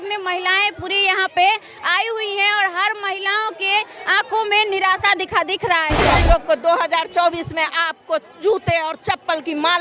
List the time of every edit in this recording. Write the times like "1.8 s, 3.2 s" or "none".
6.1 s